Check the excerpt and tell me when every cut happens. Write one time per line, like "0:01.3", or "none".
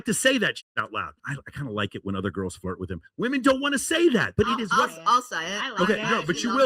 0:01.1